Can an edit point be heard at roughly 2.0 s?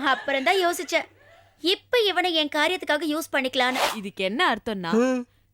no; 1 cut; at 4.0 s

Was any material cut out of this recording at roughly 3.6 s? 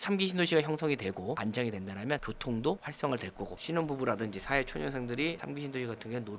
yes; 1 cut; at 3.6 s

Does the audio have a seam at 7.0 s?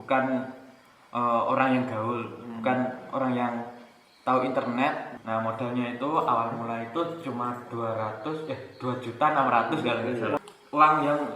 no; 2 cuts; at 5.1 s, 10.4 s

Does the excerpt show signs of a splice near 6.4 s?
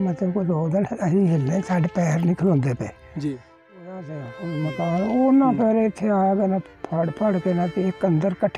no; 1 cut; at 4.1 s

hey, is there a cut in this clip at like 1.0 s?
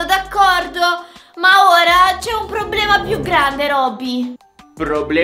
no; 0 cuts

